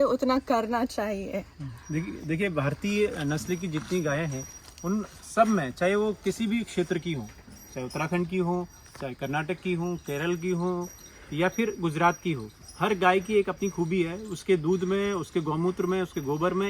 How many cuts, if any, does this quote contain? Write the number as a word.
zero